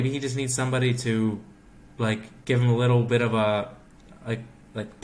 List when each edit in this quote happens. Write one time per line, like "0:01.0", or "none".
none